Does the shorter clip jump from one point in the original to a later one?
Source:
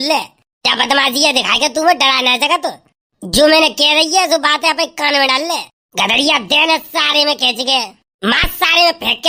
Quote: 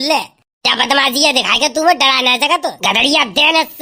yes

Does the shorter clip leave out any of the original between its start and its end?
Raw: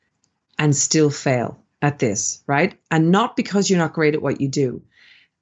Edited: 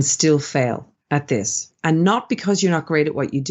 yes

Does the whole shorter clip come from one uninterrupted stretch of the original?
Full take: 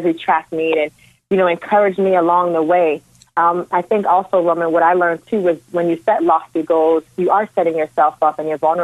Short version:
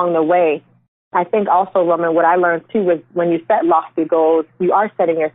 no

